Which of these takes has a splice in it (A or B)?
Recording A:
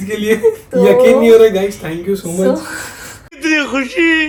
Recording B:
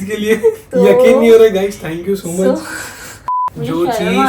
B